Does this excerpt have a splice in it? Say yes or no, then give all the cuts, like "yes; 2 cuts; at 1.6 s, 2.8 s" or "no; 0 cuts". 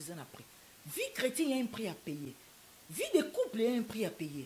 no; 0 cuts